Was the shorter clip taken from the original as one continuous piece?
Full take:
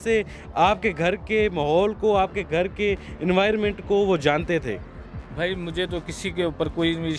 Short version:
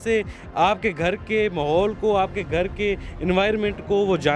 yes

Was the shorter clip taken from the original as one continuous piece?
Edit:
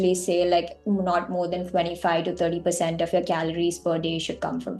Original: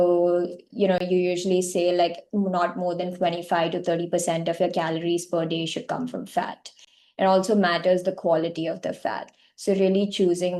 yes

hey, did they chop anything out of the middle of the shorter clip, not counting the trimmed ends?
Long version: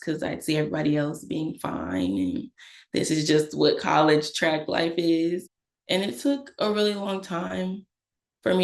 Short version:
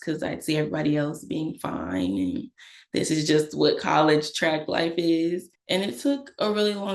yes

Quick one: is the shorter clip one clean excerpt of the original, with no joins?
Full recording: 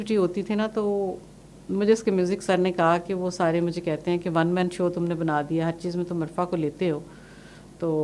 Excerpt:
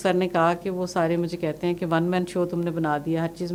yes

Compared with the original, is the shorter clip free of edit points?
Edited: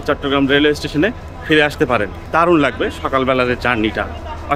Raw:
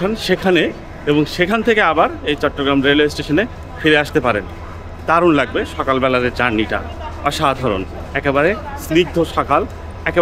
no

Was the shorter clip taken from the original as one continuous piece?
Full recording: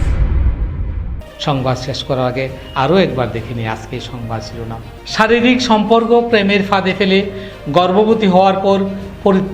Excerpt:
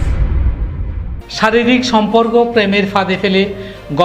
no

